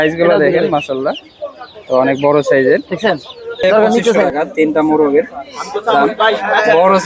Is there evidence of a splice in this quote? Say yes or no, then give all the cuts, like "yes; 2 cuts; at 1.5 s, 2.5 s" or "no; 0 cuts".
yes; 1 cut; at 4.2 s